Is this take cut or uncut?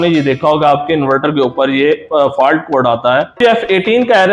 cut